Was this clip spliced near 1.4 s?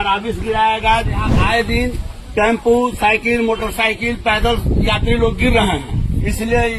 yes; 1 cut; at 1.4 s

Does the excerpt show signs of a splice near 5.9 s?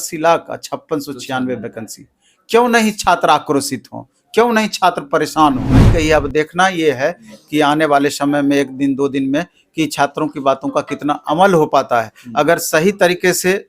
yes; 1 cut; at 5.9 s

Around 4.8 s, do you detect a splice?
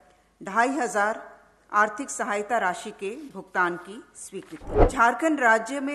yes; 1 cut; at 4.8 s

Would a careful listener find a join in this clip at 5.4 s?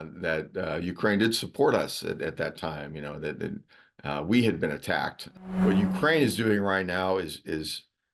yes; 1 cut; at 5.4 s

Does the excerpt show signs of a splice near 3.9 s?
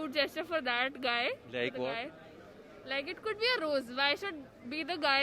no; 0 cuts

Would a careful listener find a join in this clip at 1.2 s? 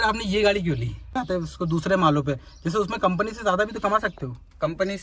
yes; 1 cut; at 1.2 s

